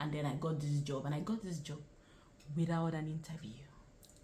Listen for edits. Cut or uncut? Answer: uncut